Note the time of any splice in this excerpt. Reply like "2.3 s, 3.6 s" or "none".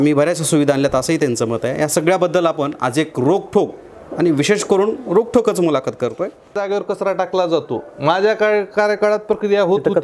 6.6 s